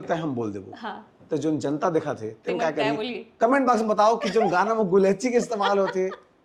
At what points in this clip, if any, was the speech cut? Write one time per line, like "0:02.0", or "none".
none